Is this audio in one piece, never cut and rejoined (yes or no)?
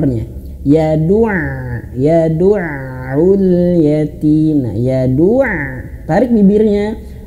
yes